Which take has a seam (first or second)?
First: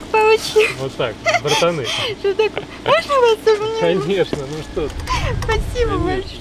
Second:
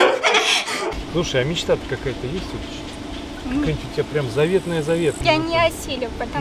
second